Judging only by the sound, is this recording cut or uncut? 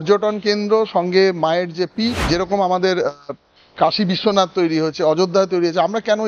cut